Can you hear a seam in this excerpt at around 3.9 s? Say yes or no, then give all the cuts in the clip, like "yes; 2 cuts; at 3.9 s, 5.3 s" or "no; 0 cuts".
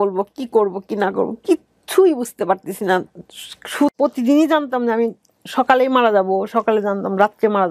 yes; 1 cut; at 3.9 s